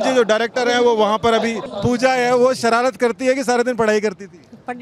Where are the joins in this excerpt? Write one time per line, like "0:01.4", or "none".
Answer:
0:01.6

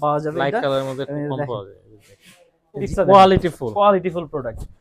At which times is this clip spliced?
0:02.9

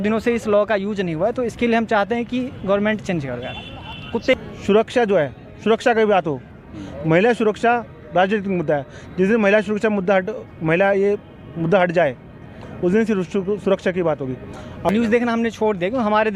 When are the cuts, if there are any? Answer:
0:04.4
0:14.9

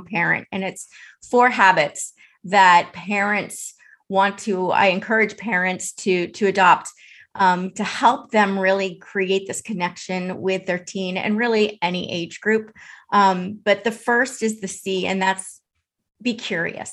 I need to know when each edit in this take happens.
none

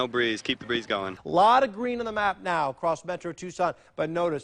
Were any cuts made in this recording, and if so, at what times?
0:01.1

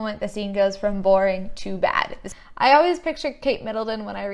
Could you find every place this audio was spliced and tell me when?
0:02.2

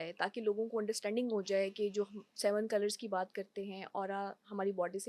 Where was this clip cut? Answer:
none

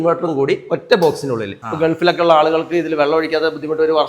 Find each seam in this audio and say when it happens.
0:01.6

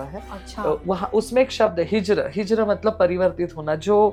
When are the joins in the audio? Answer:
none

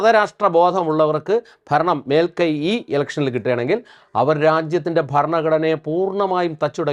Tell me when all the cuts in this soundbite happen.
none

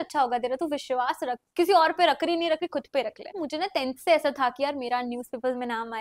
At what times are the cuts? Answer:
0:03.3

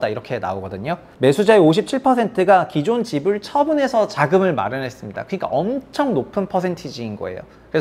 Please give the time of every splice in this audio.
0:01.0

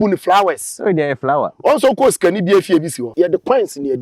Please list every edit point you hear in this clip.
0:03.1

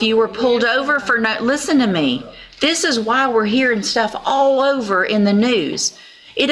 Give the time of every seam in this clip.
none

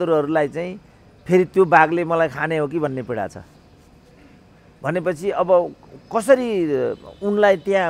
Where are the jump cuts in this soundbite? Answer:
none

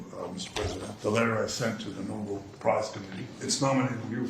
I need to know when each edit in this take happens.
0:00.9
0:03.4

